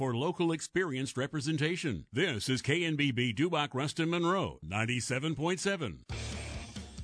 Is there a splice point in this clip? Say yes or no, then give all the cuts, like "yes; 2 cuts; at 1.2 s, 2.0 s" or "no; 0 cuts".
yes; 1 cut; at 6.1 s